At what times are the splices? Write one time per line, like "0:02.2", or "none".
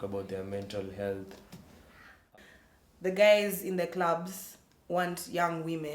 0:02.3